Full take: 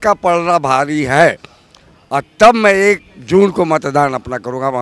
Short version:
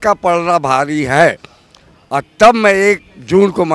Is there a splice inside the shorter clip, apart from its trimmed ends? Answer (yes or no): no